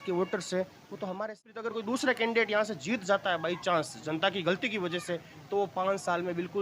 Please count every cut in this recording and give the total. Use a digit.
1